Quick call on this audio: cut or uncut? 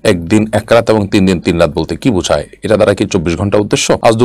uncut